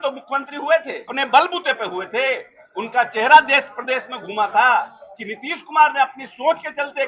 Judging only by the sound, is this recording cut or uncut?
cut